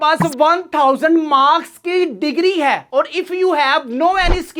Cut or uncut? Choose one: uncut